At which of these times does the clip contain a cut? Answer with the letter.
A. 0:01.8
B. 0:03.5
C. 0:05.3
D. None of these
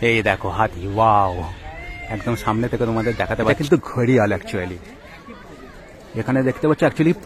B